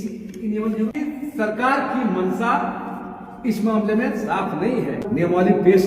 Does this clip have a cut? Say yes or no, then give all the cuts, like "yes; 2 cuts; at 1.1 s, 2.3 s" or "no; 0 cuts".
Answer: yes; 2 cuts; at 0.9 s, 5.0 s